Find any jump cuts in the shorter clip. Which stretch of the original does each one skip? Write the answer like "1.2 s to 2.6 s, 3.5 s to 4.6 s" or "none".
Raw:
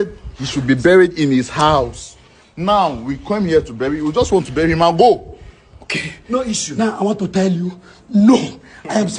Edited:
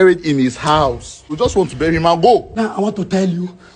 2.2 s to 4.0 s, 5.2 s to 6.7 s